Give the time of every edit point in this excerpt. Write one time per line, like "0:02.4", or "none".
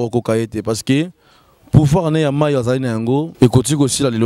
0:03.3